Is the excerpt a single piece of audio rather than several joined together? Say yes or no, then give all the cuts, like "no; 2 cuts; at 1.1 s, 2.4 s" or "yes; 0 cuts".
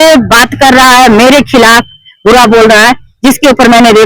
yes; 0 cuts